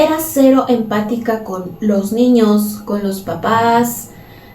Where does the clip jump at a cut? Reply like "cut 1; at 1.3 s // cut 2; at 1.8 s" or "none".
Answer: none

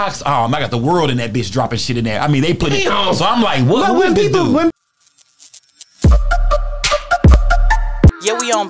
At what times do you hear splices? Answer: cut 1; at 4.7 s

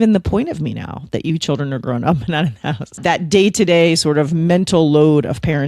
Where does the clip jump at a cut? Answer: cut 1; at 3.0 s

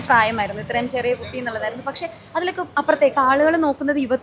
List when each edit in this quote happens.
none

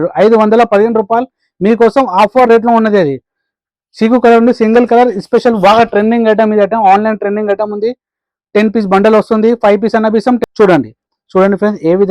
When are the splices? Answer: cut 1; at 10.4 s

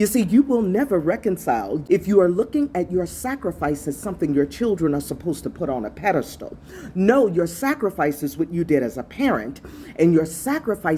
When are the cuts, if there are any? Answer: cut 1; at 1.8 s

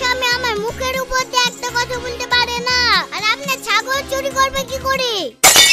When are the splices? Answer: none

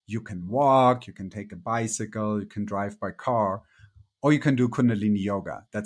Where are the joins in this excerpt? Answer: none

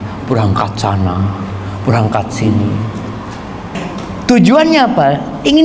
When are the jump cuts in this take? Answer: cut 1; at 3.7 s

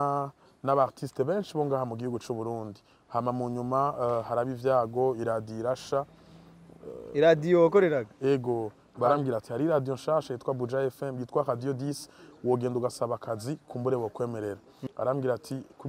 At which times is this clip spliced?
cut 1; at 8.8 s // cut 2; at 14.7 s

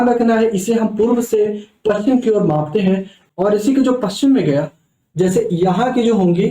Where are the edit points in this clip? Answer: cut 1; at 3.1 s

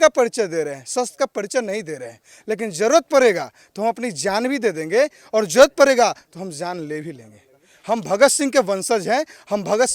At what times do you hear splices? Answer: none

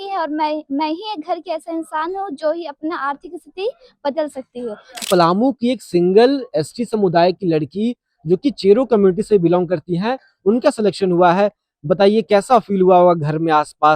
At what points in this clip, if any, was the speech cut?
cut 1; at 5.0 s

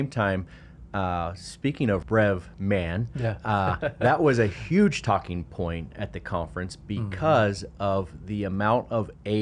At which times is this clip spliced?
cut 1; at 2.0 s

